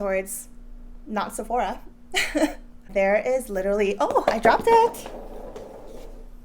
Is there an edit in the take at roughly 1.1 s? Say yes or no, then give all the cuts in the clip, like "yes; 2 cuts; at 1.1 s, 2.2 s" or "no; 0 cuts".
no; 1 cut; at 2.8 s